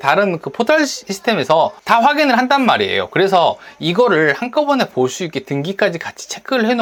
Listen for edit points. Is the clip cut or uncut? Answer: uncut